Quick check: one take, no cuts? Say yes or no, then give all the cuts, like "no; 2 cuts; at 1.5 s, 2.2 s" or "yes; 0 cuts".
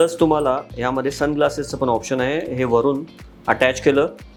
yes; 0 cuts